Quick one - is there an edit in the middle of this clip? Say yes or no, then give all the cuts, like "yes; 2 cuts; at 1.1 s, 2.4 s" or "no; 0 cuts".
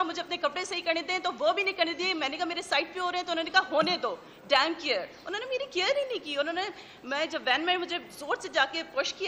no; 0 cuts